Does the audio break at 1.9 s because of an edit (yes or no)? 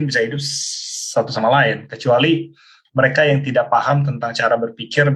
no